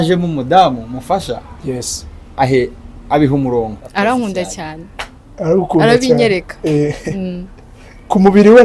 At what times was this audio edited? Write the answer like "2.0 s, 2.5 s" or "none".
3.8 s